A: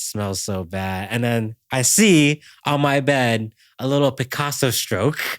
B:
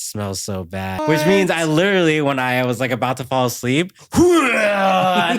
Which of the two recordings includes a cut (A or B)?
B